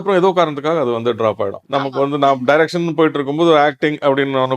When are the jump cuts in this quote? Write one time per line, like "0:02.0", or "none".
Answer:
0:01.6